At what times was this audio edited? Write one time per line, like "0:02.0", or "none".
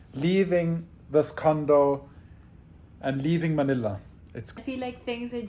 0:04.5